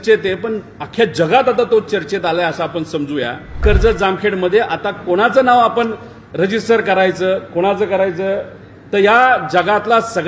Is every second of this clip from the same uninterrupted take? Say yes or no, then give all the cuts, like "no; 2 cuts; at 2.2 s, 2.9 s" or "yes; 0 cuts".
no; 1 cut; at 3.6 s